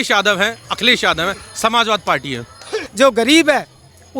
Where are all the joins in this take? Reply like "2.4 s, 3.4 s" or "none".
2.8 s